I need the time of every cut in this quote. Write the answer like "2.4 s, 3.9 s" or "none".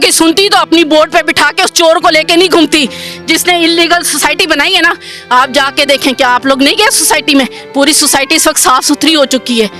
none